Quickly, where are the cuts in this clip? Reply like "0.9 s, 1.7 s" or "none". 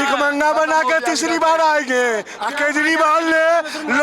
2.4 s